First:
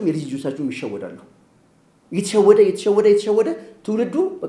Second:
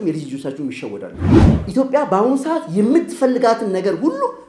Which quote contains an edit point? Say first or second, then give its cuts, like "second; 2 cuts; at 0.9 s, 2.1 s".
second; 1 cut; at 1.5 s